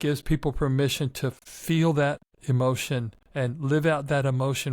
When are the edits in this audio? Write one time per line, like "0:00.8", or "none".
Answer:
0:01.5
0:02.3
0:03.2